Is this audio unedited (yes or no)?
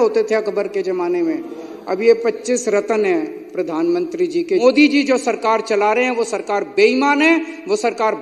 no